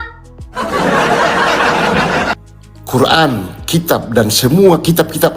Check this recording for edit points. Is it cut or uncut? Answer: cut